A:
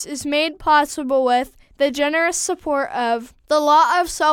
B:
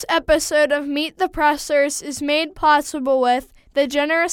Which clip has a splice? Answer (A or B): A